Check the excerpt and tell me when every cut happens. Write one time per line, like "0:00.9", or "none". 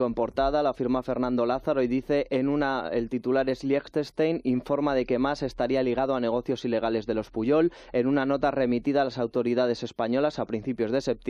0:01.9